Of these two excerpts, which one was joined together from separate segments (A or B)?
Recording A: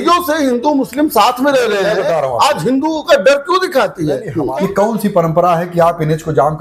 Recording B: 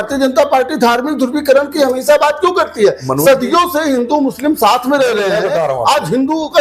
A